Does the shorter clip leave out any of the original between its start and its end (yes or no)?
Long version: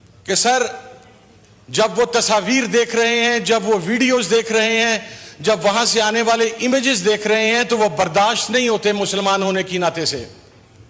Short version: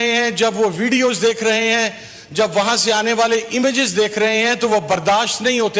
no